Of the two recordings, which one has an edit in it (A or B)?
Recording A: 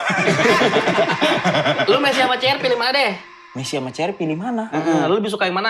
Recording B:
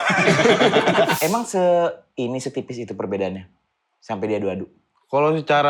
B